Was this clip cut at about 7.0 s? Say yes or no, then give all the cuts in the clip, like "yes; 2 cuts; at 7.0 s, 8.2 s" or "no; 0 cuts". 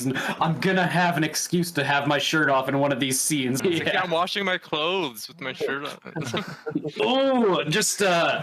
yes; 2 cuts; at 3.6 s, 7.0 s